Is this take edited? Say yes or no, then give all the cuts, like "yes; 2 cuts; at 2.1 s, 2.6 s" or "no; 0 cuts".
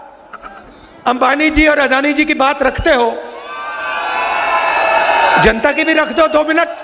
no; 0 cuts